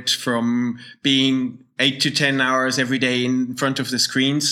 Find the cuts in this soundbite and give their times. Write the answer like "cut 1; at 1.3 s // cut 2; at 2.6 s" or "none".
none